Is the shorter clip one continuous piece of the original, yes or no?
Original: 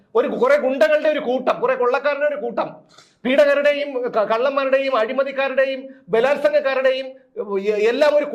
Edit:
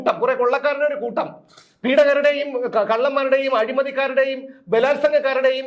yes